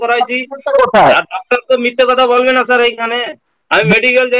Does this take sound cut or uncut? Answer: uncut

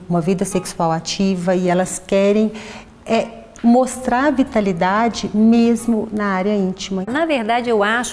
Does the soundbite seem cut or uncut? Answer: cut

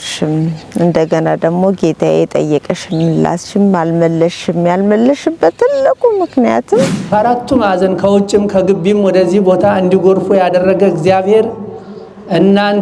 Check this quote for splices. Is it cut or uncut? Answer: cut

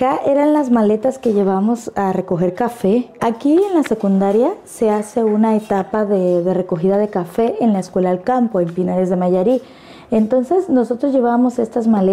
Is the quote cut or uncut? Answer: uncut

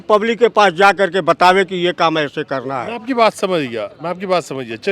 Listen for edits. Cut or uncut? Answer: uncut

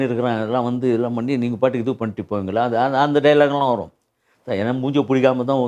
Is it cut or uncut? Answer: uncut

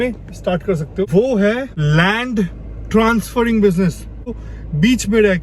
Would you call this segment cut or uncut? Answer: cut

